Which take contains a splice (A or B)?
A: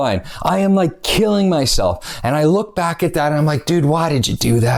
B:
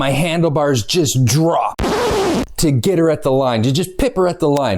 B